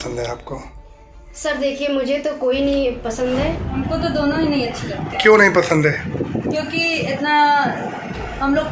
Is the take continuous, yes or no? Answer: no